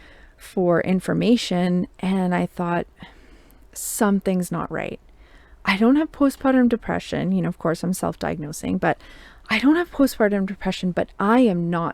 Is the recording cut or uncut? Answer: uncut